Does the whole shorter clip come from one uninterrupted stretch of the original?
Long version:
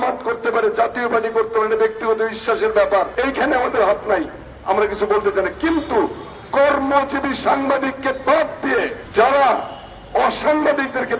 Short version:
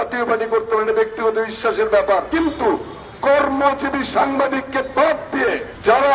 no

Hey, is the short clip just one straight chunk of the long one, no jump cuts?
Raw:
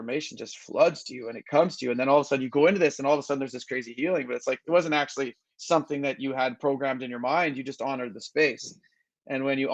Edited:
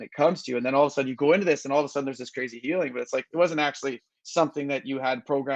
yes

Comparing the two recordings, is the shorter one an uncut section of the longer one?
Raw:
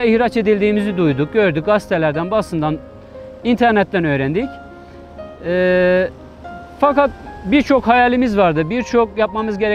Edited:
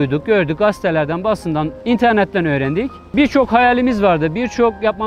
no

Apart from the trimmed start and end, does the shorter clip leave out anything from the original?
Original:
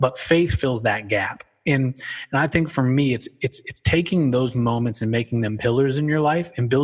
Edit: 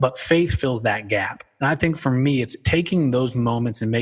yes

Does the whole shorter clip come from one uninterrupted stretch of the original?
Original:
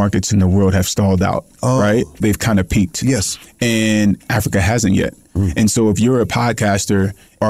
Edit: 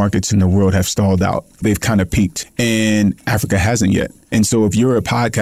no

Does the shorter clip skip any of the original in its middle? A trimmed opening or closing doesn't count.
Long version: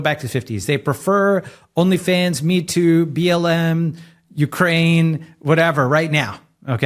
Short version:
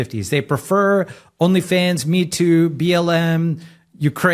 no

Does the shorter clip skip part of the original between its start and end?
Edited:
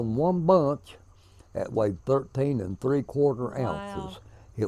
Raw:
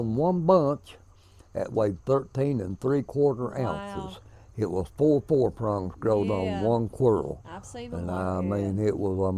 no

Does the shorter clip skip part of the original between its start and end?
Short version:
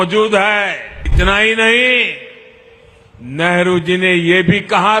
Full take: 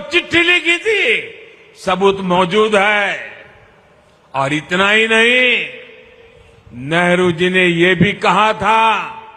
yes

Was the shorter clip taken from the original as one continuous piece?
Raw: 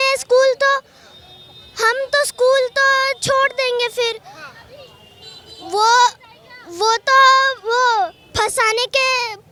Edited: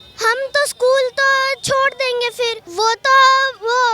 no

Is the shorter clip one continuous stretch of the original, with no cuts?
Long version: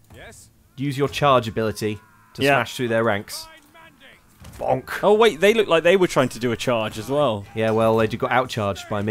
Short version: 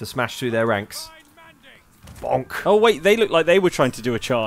yes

